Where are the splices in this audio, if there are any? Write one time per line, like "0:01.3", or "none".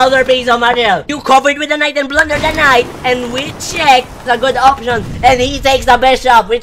0:01.1
0:04.2